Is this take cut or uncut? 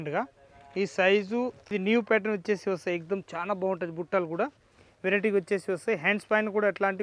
cut